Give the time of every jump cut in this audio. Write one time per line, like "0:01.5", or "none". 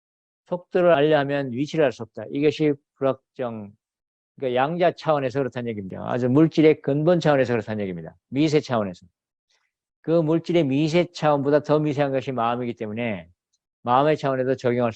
0:05.8